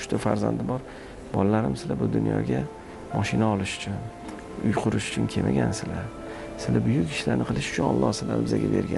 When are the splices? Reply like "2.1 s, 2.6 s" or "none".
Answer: none